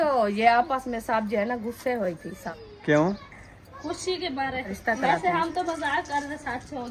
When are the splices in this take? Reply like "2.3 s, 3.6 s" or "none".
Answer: 2.6 s, 4.7 s